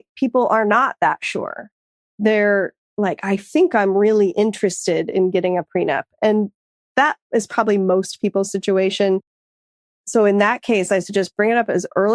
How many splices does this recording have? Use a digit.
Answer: 0